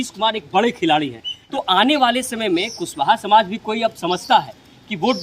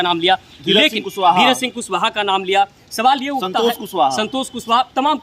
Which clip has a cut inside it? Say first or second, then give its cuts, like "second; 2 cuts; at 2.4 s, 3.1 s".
first; 1 cut; at 1.3 s